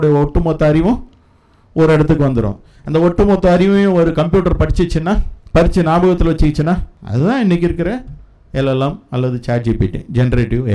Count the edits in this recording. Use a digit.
2